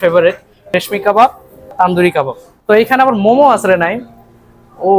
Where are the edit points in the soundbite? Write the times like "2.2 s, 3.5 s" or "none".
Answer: 1.7 s